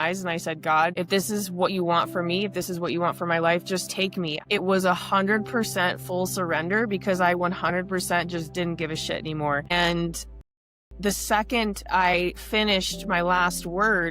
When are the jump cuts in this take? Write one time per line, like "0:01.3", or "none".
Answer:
0:00.9
0:04.4
0:09.7